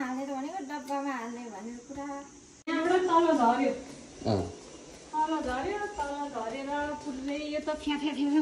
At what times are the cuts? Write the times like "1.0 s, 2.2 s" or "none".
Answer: 2.4 s